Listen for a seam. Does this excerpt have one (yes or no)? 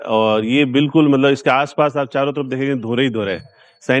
no